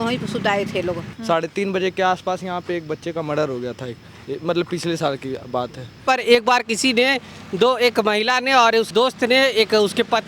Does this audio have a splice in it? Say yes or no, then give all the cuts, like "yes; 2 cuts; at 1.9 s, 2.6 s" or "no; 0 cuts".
yes; 3 cuts; at 1.1 s, 6.0 s, 8.9 s